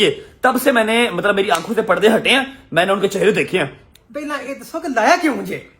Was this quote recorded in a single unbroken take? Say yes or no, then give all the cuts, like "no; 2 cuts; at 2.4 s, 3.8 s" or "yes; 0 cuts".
no; 1 cut; at 3.8 s